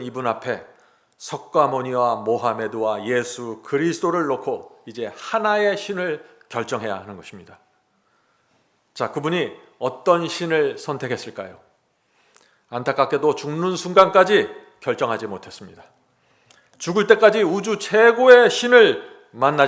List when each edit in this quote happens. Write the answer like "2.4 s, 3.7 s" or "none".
none